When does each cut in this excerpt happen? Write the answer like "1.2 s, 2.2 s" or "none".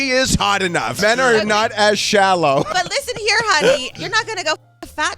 1.0 s, 2.7 s, 3.9 s